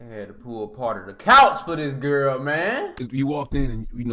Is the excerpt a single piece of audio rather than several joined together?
no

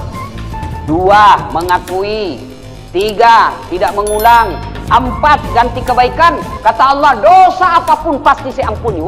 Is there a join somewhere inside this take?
no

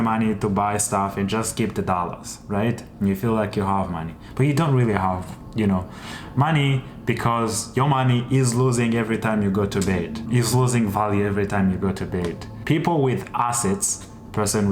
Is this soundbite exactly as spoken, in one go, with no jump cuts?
no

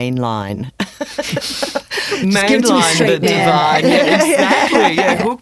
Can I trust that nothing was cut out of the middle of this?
yes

